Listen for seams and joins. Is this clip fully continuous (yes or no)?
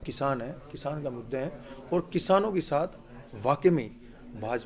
yes